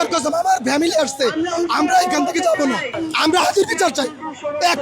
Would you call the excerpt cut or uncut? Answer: cut